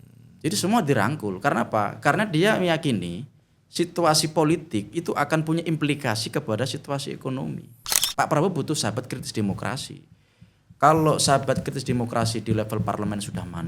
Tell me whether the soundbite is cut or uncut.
cut